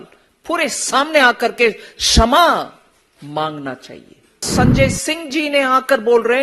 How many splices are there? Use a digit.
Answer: 1